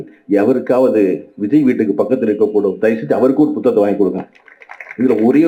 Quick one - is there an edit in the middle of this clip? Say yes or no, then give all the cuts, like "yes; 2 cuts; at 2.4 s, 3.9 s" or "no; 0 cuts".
no; 0 cuts